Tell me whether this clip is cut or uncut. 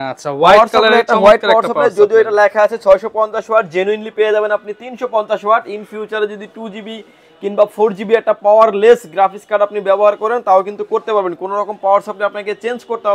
uncut